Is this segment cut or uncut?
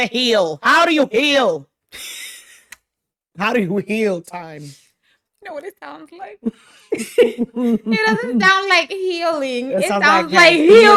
uncut